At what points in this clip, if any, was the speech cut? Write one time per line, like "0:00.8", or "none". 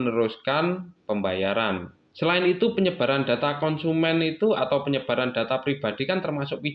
0:02.1